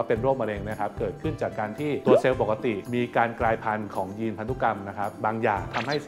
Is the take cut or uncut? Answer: uncut